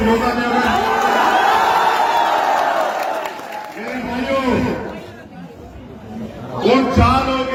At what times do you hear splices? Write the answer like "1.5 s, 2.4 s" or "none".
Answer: none